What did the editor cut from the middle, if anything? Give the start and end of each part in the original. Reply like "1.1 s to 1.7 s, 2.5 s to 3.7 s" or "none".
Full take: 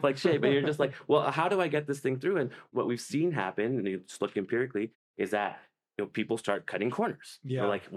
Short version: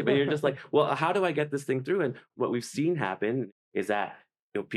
3.8 s to 4.9 s